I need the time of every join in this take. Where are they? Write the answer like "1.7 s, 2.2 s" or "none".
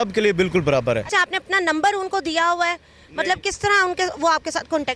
1.1 s